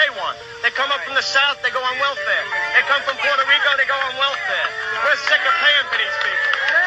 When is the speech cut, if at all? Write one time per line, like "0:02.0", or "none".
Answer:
0:01.6

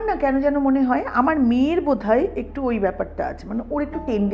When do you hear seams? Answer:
none

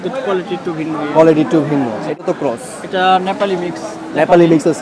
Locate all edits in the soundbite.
0:02.2

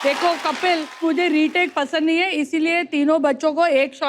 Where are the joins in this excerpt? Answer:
0:00.9

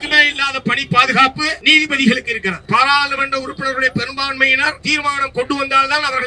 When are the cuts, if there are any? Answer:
0:01.6
0:02.6
0:04.8

